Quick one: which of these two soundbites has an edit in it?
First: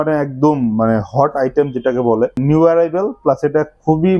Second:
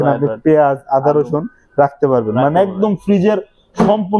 first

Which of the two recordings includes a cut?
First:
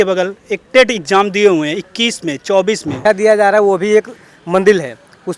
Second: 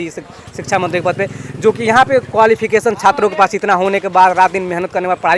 first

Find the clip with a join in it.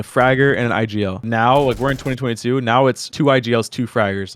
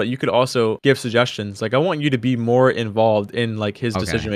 first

